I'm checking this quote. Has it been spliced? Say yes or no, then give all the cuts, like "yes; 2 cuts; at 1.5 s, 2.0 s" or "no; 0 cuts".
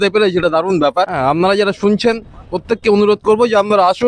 no; 0 cuts